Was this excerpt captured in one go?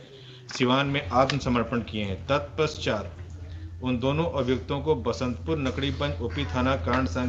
yes; 0 cuts

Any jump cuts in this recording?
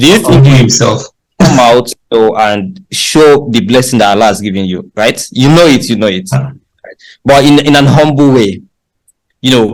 no; 0 cuts

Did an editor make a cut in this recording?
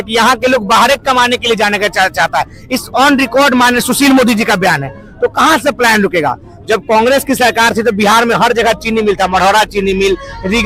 no; 0 cuts

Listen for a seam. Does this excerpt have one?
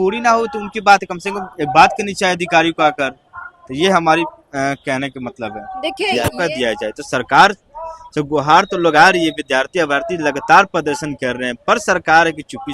yes; 1 cut; at 6.4 s

